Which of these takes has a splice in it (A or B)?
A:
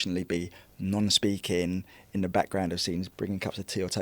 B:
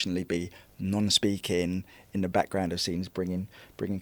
A